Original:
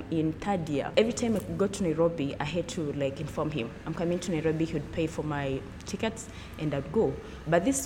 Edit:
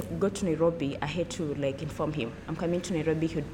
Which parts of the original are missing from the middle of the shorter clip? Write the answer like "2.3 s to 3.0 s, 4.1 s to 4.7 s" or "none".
none